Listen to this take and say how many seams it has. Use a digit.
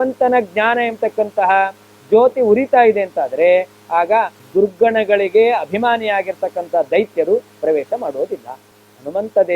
1